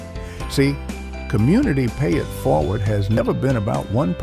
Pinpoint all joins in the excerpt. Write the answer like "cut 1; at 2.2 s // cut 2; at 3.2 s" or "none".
cut 1; at 3.2 s